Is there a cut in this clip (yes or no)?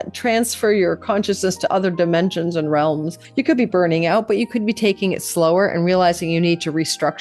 yes